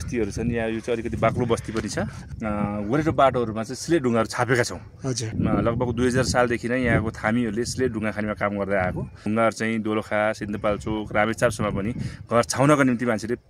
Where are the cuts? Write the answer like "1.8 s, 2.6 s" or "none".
2.2 s, 5.3 s, 9.2 s